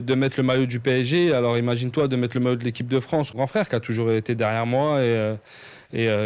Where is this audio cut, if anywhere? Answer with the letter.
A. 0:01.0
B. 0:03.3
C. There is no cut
B